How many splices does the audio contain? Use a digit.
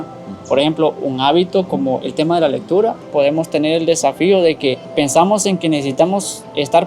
2